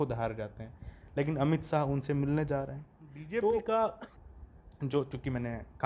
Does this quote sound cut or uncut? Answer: uncut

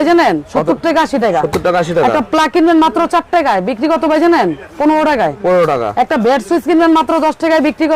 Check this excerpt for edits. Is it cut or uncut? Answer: uncut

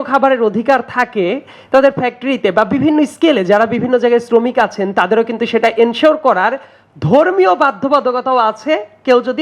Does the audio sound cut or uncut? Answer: uncut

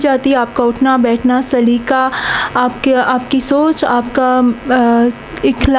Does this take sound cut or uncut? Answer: uncut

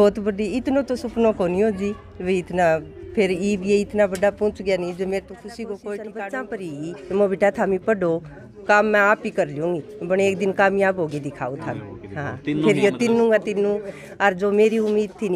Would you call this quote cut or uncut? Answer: cut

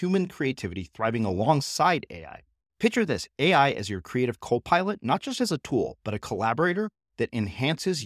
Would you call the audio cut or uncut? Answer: uncut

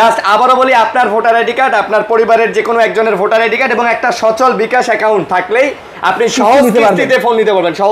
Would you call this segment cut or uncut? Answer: uncut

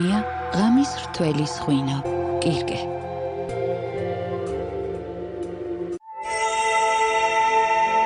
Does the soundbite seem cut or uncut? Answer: cut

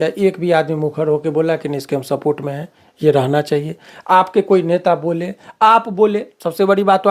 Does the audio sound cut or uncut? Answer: uncut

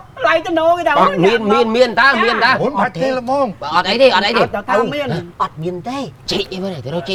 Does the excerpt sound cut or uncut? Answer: uncut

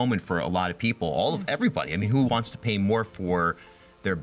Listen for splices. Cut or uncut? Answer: uncut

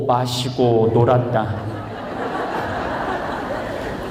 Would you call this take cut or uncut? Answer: uncut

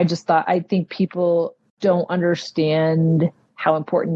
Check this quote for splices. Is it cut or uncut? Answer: cut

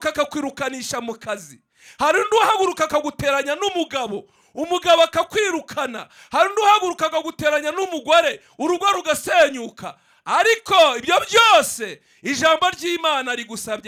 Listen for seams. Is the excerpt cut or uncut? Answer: uncut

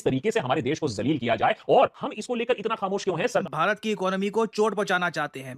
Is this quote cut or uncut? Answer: cut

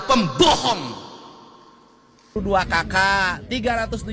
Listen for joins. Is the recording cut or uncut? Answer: cut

